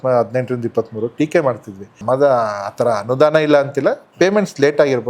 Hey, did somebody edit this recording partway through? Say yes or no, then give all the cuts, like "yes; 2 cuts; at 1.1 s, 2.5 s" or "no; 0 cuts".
yes; 1 cut; at 1.9 s